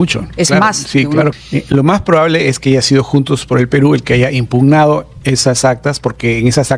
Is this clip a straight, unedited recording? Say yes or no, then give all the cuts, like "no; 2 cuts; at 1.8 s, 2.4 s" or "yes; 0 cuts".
no; 1 cut; at 1.4 s